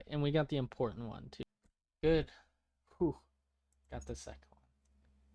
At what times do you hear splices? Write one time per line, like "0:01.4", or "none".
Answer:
0:01.3